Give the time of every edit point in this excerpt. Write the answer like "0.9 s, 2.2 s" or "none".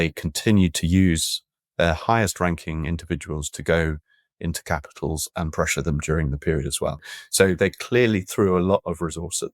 7.1 s

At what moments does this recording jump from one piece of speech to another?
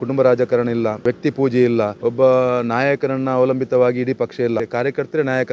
1.0 s, 1.9 s, 4.6 s

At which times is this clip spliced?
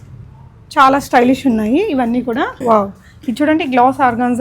2.6 s

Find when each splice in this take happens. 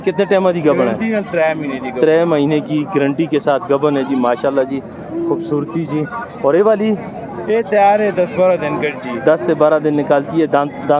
none

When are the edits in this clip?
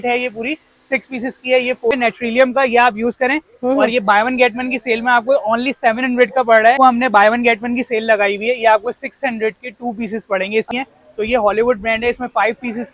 1.9 s, 6.8 s, 10.7 s

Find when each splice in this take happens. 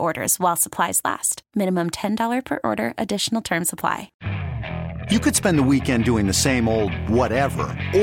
4.1 s

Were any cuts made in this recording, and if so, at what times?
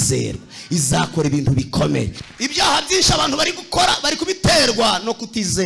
2.3 s

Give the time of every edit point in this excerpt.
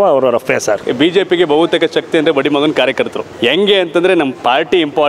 0.8 s, 3.2 s

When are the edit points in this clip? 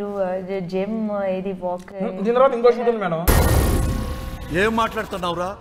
none

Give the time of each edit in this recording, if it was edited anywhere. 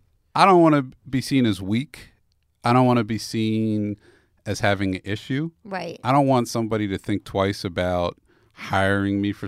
none

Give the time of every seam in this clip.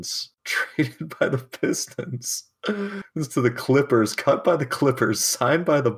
none

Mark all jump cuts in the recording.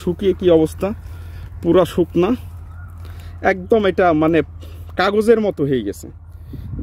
none

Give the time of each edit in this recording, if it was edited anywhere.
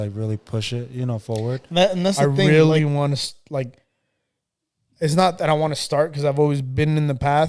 2.5 s

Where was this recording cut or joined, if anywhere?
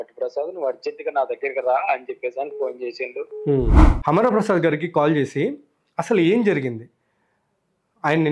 3.9 s

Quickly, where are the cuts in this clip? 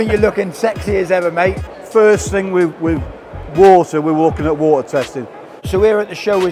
1.7 s, 5.7 s

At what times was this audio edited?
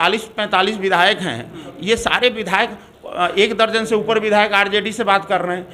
none

